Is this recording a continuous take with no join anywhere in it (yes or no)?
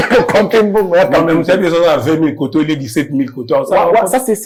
yes